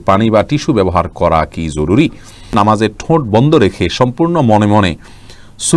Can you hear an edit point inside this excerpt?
yes; 1 cut; at 2.5 s

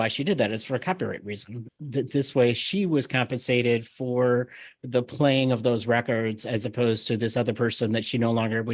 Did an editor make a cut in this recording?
yes; 1 cut; at 1.7 s

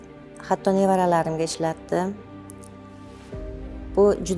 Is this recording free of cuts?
yes; 0 cuts

